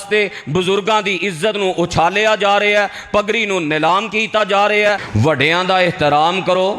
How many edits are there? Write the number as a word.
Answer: one